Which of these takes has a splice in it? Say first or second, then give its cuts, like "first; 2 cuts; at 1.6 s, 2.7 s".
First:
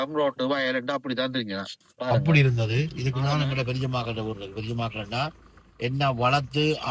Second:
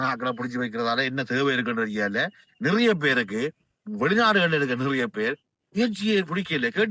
first; 1 cut; at 2.2 s